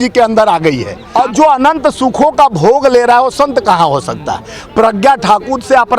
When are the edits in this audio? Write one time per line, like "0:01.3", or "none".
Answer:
0:00.9